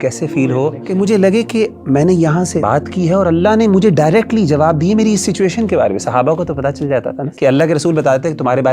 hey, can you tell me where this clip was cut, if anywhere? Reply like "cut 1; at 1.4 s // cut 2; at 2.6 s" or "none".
cut 1; at 0.8 s // cut 2; at 2.6 s // cut 3; at 7.2 s